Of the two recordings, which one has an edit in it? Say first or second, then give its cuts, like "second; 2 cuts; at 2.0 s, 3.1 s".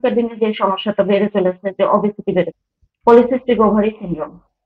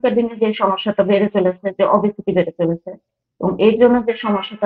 first; 1 cut; at 2.5 s